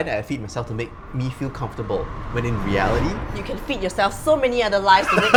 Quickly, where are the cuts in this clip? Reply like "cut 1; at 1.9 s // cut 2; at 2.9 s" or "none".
none

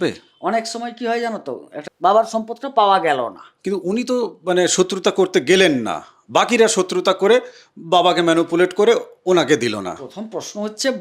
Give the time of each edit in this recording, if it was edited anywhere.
cut 1; at 1.7 s

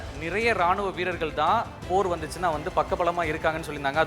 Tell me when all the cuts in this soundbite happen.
cut 1; at 1.8 s

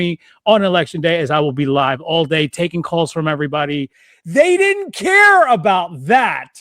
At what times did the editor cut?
cut 1; at 4.0 s

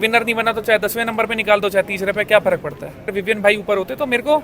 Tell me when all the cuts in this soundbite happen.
cut 1; at 3.2 s

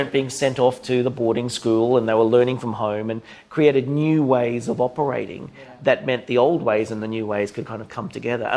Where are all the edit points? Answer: none

